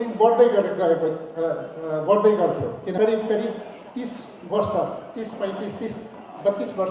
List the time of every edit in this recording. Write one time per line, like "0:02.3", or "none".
0:02.9